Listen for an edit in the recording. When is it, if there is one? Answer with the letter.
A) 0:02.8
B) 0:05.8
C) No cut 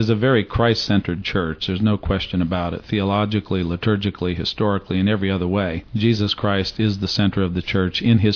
B